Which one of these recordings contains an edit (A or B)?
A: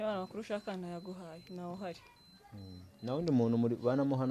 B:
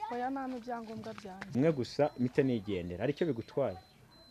B